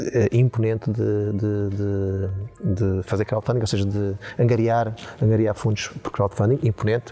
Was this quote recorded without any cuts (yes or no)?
yes